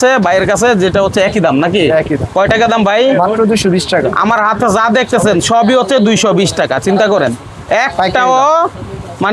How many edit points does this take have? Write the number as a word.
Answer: zero